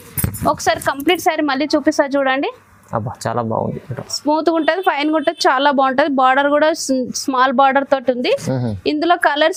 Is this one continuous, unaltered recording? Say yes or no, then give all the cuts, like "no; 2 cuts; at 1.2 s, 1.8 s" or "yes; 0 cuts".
yes; 0 cuts